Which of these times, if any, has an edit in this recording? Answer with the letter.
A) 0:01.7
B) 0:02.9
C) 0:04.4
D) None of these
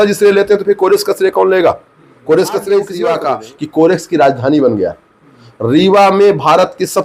B